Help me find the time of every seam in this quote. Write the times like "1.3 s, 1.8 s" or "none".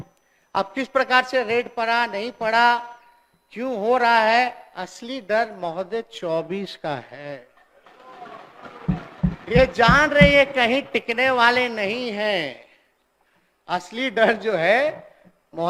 none